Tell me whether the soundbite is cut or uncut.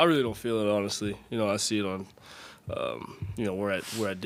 uncut